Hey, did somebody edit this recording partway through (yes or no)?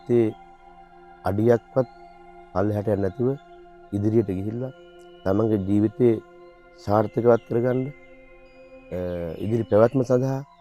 no